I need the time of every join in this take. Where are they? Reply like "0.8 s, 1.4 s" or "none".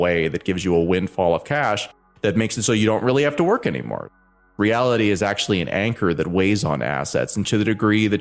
4.1 s